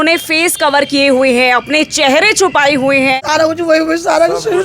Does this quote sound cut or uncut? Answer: cut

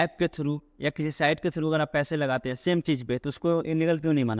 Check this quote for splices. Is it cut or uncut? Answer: uncut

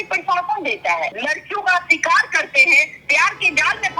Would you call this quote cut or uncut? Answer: cut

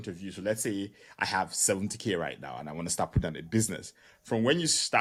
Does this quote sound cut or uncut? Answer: uncut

